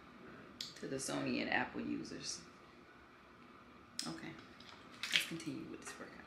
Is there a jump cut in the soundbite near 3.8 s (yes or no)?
yes